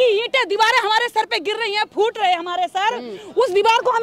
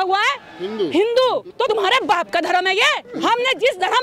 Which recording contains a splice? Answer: second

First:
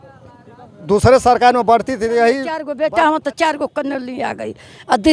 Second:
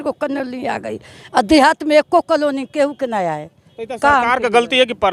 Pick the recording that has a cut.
first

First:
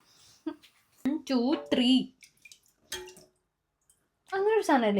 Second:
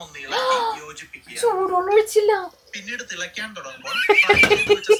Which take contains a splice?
first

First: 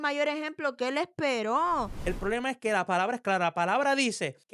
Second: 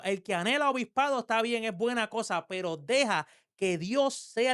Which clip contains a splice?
first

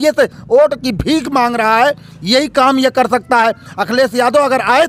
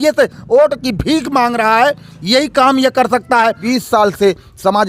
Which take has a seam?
second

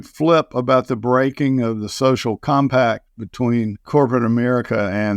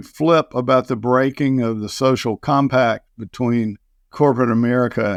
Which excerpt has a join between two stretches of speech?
first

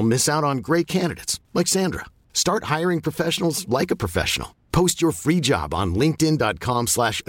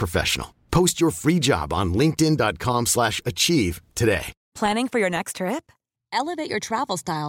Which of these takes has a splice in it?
second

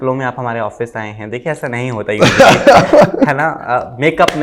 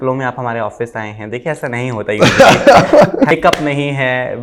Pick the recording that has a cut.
second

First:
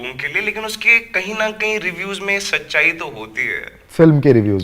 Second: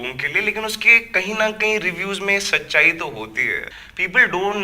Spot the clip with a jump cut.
second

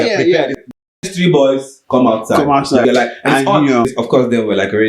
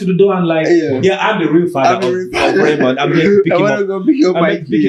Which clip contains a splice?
first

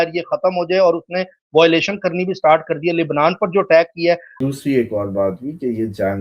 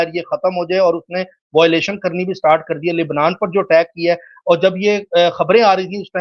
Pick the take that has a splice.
first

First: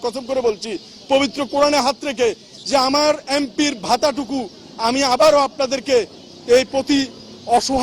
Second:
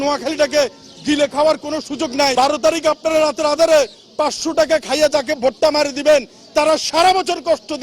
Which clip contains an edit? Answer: second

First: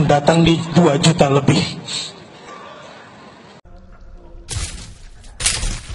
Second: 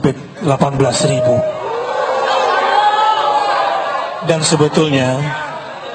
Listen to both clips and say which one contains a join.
first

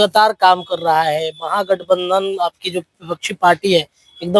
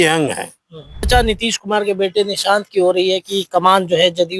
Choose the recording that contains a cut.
second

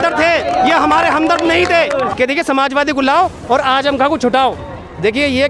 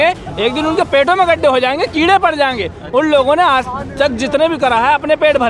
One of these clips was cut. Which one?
first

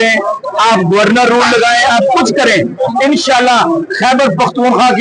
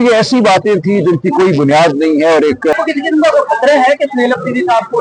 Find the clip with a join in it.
second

